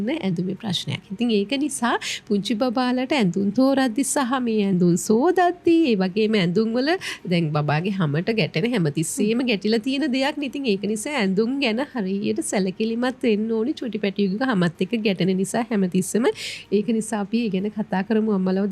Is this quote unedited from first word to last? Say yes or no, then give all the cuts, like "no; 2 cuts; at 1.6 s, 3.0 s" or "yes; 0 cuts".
yes; 0 cuts